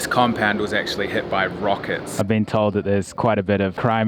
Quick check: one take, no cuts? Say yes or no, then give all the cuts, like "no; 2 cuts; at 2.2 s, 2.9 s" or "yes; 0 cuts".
no; 1 cut; at 2.1 s